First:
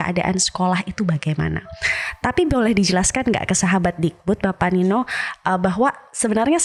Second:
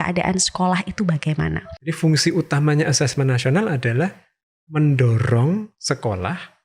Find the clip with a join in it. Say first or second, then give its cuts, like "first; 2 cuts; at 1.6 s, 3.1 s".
second; 1 cut; at 1.7 s